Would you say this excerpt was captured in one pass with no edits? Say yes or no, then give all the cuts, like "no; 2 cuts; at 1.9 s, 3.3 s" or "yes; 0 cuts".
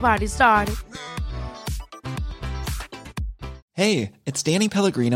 no; 1 cut; at 3.6 s